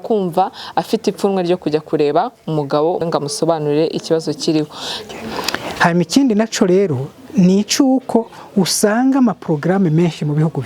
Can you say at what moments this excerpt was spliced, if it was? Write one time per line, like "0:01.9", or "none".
0:03.0
0:04.9